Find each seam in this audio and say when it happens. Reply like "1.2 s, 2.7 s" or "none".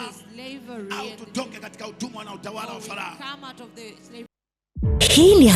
4.3 s